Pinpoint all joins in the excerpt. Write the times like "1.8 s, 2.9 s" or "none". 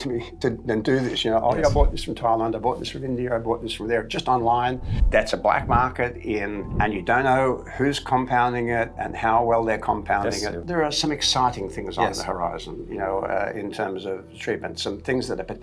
5.0 s, 6.6 s, 10.6 s